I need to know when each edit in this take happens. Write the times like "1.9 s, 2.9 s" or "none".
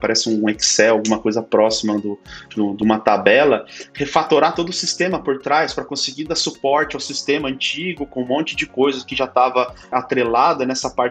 9.9 s